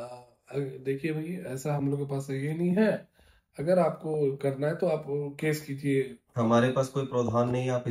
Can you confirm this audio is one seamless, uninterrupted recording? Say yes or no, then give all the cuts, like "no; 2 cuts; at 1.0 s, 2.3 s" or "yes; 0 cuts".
yes; 0 cuts